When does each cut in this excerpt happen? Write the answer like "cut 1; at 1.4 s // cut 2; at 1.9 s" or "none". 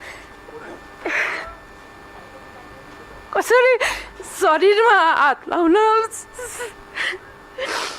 cut 1; at 3.3 s

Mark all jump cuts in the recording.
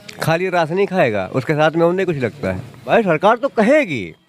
cut 1; at 2.7 s

